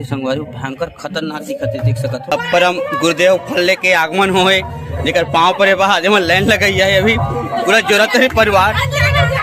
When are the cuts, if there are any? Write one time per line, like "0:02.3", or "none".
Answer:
0:02.3

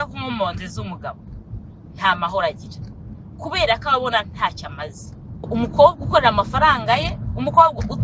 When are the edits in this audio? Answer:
0:05.4

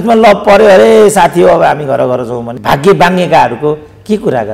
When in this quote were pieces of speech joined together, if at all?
0:02.5

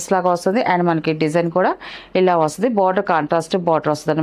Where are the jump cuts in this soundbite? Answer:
none

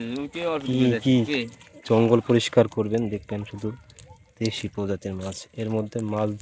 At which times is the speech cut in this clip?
none

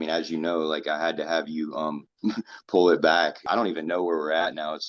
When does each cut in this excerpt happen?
0:03.5

